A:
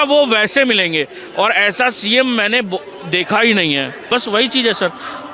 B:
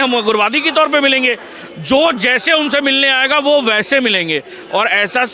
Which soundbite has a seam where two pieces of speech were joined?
A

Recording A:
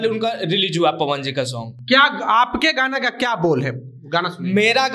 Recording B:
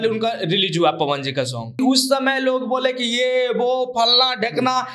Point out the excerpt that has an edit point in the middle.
B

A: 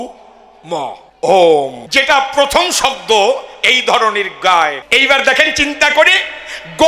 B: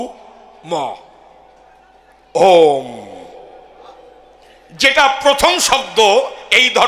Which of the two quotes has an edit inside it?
A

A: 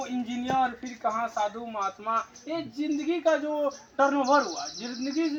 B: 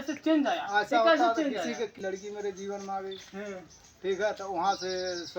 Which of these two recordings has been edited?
B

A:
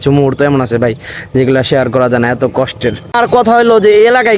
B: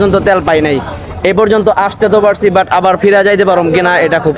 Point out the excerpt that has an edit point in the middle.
A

